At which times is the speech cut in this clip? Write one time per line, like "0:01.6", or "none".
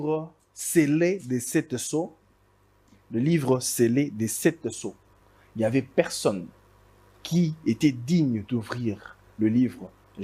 none